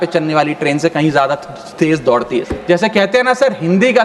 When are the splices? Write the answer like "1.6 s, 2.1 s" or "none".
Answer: 2.5 s